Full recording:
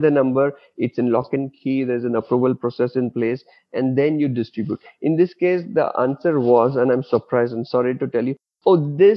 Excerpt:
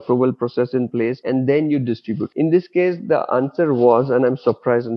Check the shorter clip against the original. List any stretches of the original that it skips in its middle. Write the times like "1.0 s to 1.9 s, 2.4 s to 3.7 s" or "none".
3.4 s to 3.7 s, 4.8 s to 4.9 s